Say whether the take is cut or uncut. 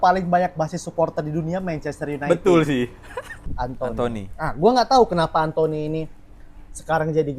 cut